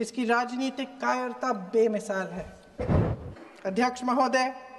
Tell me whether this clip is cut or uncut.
cut